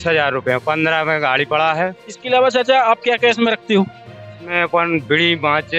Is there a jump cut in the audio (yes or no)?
yes